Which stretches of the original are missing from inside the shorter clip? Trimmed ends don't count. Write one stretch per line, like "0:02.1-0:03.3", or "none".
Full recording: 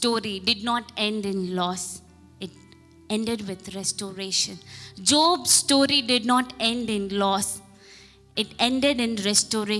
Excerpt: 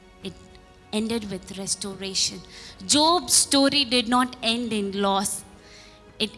none